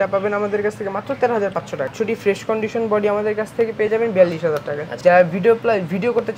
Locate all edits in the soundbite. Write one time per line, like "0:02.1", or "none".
0:01.9
0:04.9